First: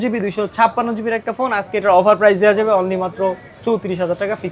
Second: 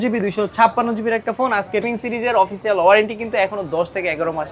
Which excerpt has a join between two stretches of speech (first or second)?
second